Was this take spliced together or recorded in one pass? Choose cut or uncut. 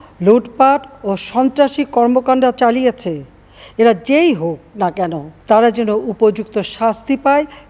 uncut